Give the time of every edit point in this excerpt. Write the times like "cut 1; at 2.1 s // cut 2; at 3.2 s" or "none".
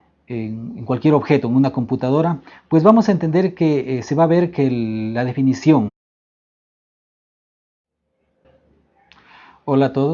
none